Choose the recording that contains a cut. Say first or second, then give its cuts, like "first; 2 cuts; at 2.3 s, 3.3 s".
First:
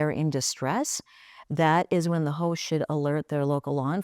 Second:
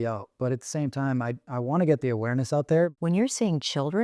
second; 1 cut; at 3.0 s